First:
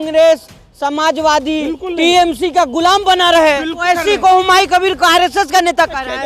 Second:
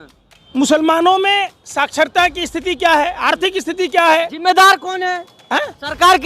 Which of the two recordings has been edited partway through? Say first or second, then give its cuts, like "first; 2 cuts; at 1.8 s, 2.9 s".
first; 1 cut; at 3.7 s